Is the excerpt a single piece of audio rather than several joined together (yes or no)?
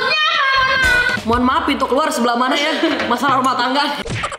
no